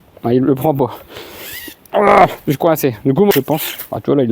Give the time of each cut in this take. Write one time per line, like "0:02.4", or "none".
0:03.3